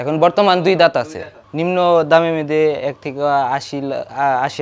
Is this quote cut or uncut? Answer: uncut